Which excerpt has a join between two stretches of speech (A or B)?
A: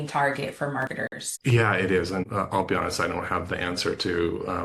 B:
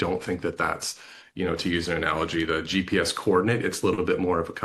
A